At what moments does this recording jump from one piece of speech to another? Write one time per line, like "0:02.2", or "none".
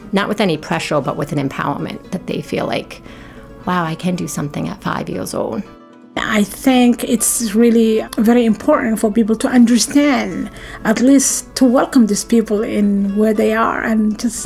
0:06.2
0:08.1